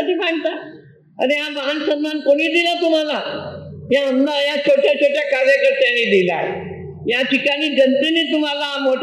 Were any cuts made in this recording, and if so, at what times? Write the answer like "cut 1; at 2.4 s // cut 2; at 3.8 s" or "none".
none